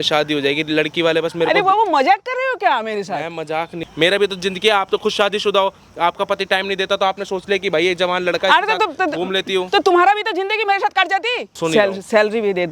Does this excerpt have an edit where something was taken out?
yes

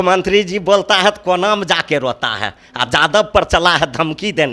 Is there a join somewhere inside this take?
no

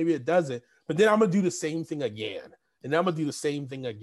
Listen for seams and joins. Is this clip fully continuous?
yes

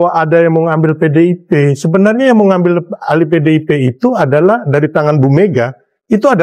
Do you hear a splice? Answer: no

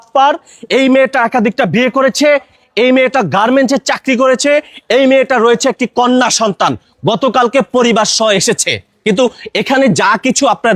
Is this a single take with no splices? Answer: yes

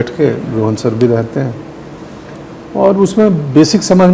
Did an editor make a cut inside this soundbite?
no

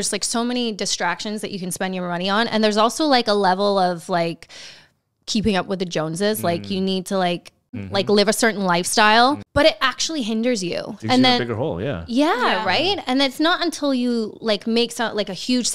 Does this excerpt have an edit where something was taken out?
yes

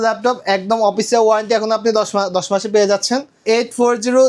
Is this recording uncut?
no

